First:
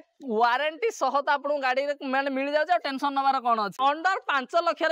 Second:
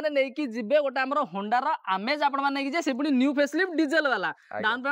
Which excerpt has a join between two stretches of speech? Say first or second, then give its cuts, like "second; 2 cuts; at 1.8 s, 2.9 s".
first; 1 cut; at 3.8 s